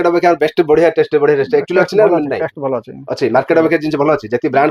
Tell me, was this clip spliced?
no; 0 cuts

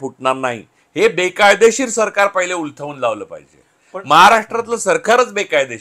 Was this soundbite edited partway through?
no; 0 cuts

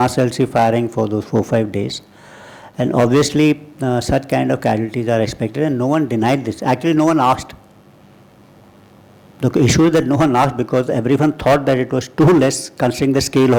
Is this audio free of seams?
yes; 0 cuts

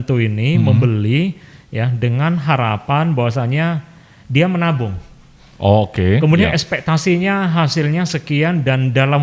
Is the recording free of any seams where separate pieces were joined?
yes; 0 cuts

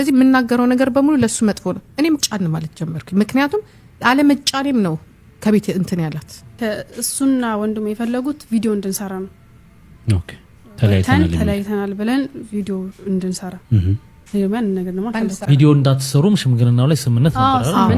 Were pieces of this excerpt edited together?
yes; 3 cuts; at 2.2 s, 6.6 s, 15.4 s

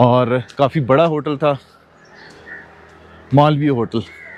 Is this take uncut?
yes; 0 cuts

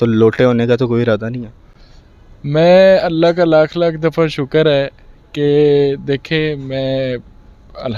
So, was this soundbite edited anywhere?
no; 0 cuts

